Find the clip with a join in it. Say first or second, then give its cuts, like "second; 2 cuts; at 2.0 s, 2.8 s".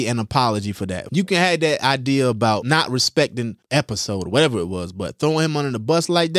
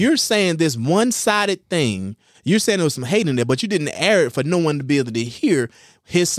first; 3 cuts; at 1.0 s, 2.6 s, 3.6 s